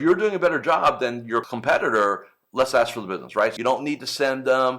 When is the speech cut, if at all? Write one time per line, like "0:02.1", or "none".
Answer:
0:01.5
0:03.5